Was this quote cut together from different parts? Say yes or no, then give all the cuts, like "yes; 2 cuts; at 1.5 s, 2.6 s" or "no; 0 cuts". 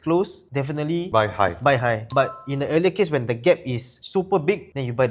no; 0 cuts